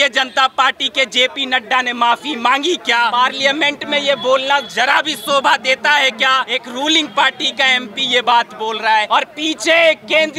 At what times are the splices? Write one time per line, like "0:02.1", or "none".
0:03.1
0:06.6
0:09.1